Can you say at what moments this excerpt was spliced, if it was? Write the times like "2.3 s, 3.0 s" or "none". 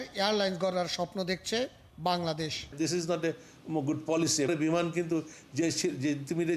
2.8 s, 4.5 s